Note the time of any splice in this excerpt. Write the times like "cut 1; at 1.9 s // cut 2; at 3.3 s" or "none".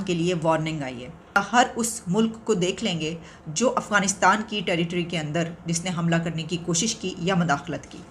cut 1; at 1.4 s